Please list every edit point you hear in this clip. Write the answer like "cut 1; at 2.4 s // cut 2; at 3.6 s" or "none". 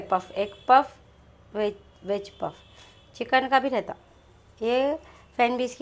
none